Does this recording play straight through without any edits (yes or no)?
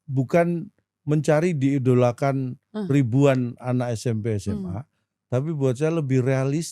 yes